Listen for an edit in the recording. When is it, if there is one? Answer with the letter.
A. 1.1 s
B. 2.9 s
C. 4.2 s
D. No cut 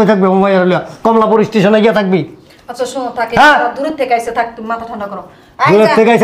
D